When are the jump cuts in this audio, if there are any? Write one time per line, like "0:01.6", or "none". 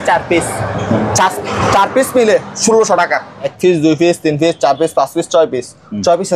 0:03.5